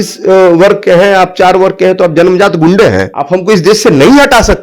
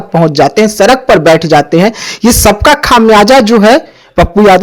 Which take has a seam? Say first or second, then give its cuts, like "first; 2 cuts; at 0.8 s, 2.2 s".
first; 1 cut; at 3.1 s